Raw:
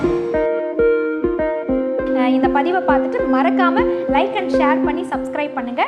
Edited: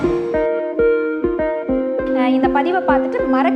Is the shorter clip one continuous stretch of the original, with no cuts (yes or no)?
yes